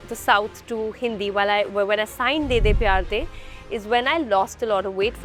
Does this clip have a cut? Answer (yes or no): no